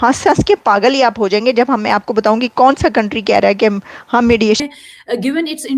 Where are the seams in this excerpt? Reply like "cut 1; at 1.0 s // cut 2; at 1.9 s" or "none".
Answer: cut 1; at 4.6 s